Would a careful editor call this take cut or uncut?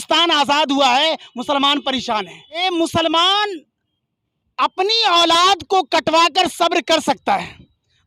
cut